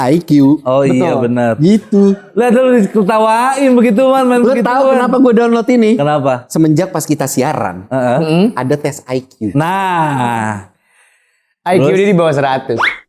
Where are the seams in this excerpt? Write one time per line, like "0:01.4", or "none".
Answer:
none